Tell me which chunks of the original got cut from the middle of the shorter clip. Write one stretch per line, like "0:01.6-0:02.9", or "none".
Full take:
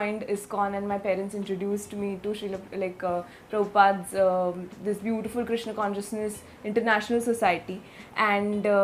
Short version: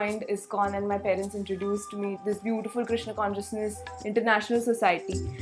0:02.2-0:04.8